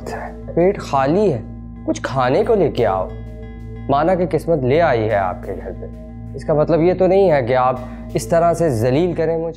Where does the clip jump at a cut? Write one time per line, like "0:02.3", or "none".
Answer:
none

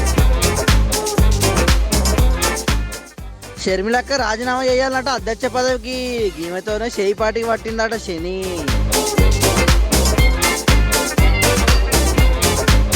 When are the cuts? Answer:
none

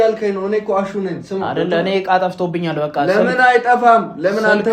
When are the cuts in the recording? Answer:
0:01.5

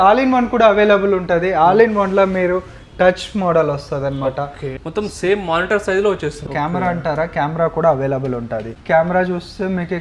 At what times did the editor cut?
0:04.7
0:06.4
0:08.7

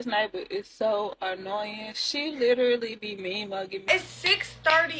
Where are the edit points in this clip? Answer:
0:03.9

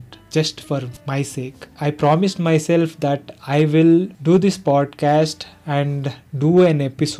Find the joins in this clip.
0:01.7

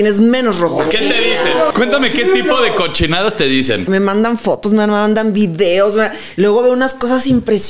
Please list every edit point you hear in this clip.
0:01.7
0:03.8

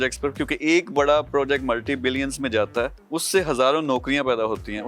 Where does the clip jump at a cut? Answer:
0:03.0

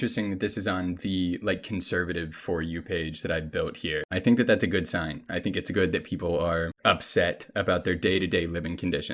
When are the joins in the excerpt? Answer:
0:04.1
0:06.7

